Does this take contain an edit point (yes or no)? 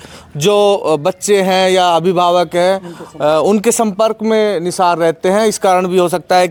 no